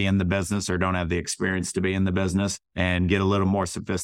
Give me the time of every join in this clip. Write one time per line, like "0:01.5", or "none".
0:02.6